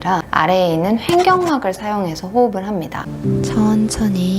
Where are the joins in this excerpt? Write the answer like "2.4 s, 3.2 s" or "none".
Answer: 3.1 s